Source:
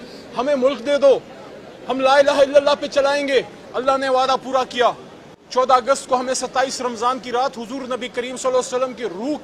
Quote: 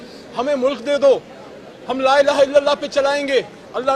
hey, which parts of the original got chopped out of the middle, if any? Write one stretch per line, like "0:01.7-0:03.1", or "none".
none

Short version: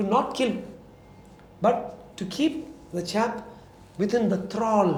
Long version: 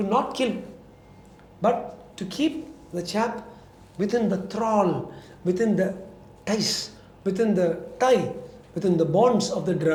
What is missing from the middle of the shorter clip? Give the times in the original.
none

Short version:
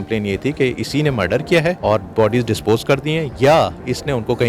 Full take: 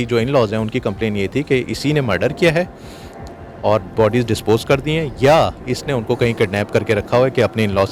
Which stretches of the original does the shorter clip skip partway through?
0:02.7-0:03.6

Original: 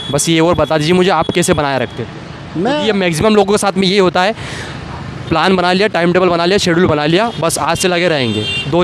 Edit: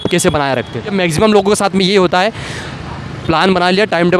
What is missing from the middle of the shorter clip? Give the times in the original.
0:02.1-0:02.9

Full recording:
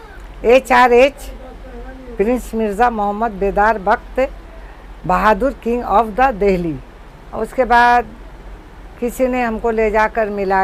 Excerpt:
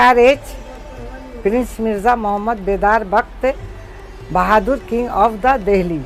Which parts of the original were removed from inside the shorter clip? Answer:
none

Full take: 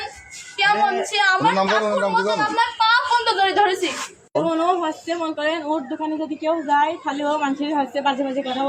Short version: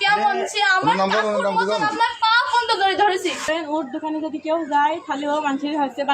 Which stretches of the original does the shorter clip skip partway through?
0:04.0-0:05.4

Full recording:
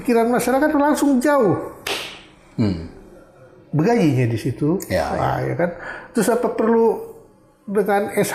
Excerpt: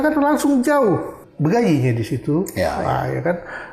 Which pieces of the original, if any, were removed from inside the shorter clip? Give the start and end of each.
0:01.8-0:03.5

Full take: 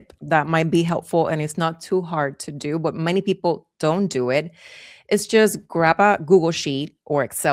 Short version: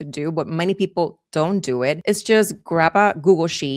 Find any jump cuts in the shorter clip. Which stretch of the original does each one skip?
0:04.5-0:05.0

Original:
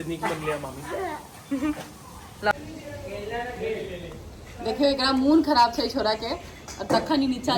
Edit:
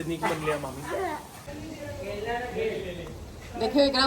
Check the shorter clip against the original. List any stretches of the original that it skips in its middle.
0:01.5-0:02.5

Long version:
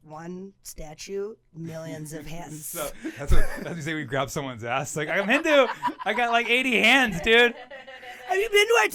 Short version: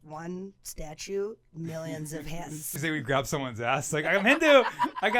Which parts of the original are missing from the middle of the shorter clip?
0:02.7-0:03.8

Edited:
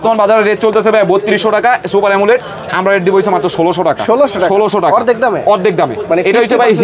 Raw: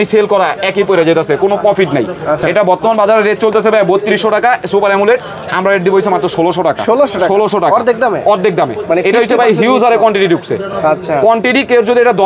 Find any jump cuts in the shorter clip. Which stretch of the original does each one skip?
none

